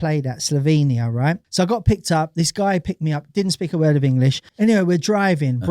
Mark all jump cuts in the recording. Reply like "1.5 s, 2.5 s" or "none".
1.4 s, 4.4 s

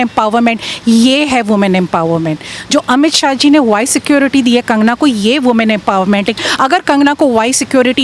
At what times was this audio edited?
6.3 s

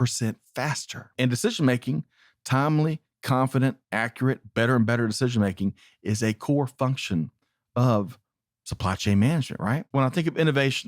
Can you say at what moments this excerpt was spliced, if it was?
1.1 s, 9.9 s

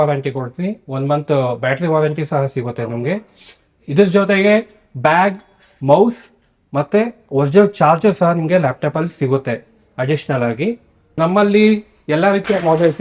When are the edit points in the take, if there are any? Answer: none

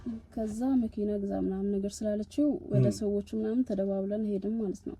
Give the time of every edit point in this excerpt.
none

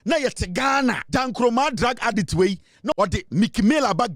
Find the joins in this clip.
1.0 s, 2.9 s

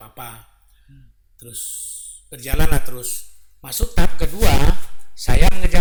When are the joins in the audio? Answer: none

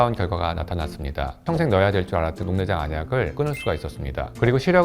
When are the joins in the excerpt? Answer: 1.5 s, 2.4 s

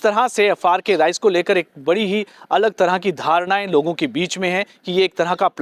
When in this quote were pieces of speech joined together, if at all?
none

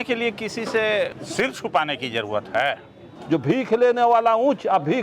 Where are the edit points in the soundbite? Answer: 1.2 s, 3.1 s

